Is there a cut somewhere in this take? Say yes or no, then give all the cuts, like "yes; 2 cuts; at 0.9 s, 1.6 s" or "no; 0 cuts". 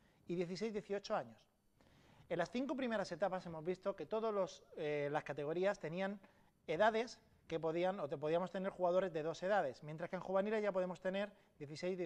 no; 0 cuts